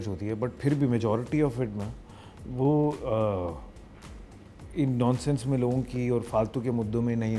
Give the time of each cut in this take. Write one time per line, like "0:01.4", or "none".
none